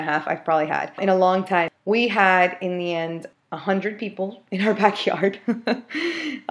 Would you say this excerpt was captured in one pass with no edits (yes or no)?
yes